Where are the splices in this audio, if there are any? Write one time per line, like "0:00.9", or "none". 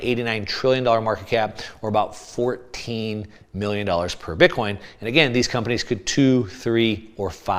none